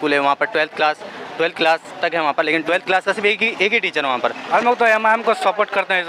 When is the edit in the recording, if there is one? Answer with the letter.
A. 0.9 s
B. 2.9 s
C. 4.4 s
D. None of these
C